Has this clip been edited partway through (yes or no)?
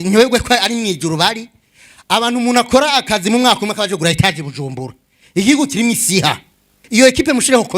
yes